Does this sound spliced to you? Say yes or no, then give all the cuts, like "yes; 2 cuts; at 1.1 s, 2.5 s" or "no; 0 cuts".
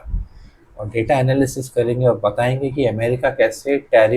no; 0 cuts